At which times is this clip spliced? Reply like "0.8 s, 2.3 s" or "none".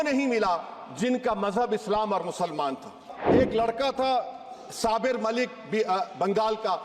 3.1 s